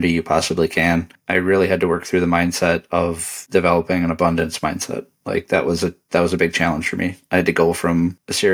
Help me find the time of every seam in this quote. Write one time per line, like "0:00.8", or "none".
0:01.2

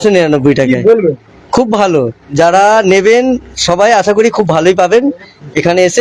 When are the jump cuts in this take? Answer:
none

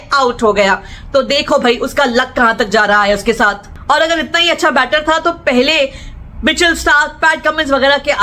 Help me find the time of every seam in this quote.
none

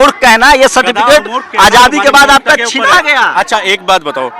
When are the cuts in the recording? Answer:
none

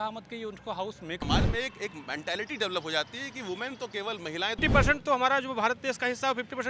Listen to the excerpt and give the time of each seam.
0:01.2
0:04.6

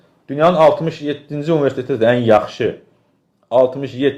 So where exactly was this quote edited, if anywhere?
none

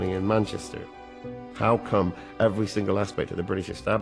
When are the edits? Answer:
0:01.2

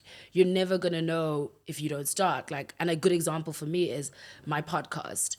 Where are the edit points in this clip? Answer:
none

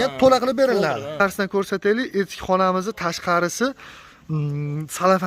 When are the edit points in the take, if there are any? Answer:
0:01.2

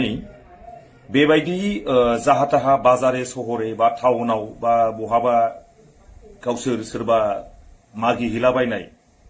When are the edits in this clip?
none

